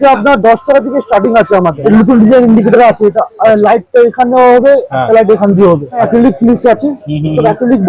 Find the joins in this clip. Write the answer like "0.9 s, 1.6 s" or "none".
1.8 s, 6.0 s